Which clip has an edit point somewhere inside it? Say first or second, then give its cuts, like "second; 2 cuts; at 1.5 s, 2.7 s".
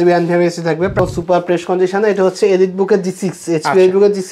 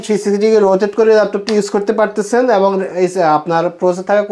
first; 1 cut; at 0.9 s